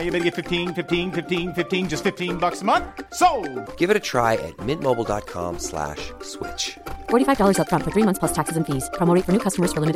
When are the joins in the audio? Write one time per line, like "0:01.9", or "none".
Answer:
none